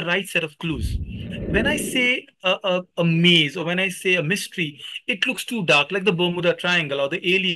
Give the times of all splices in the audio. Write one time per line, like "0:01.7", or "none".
0:01.2

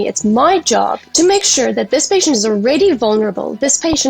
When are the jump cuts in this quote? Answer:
0:01.0

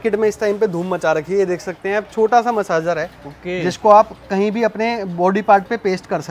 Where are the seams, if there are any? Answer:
none

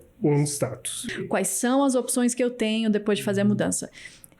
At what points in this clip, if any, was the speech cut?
0:01.1

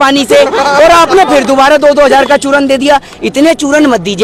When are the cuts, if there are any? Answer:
none

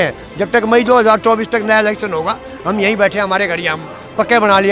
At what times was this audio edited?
none

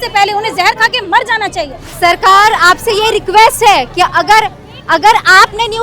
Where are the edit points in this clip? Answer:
0:01.8

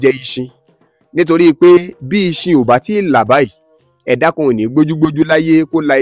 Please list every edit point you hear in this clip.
none

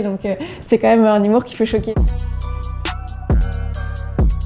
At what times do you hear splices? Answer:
0:01.9

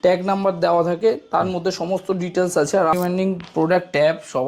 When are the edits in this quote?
0:02.9

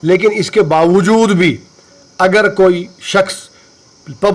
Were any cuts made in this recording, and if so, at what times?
none

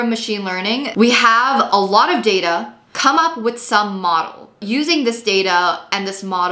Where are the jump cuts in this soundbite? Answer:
0:00.9
0:02.9
0:04.6

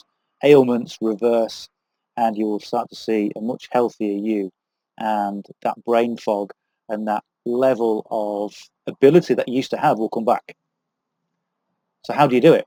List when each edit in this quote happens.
none

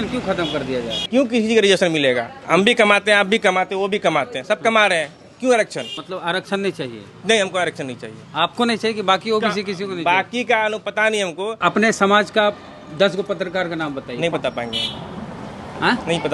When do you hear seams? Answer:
0:01.0
0:06.0
0:11.5

